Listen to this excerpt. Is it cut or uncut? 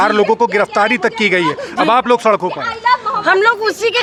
uncut